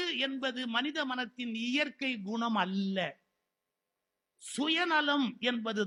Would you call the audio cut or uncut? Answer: uncut